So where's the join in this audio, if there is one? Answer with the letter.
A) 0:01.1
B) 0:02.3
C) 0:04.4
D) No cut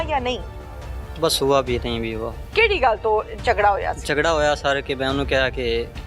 B